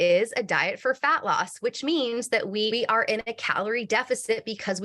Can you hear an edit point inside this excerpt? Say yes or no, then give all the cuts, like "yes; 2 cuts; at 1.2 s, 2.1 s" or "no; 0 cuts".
yes; 1 cut; at 2.7 s